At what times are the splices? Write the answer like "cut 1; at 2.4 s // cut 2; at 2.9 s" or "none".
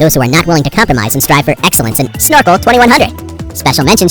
cut 1; at 2.1 s